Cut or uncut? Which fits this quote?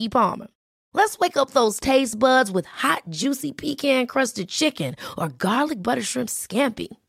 uncut